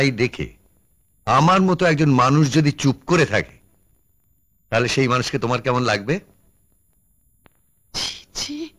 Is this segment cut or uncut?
uncut